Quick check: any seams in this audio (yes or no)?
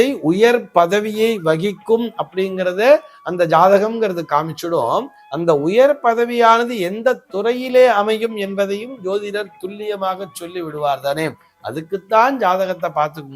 no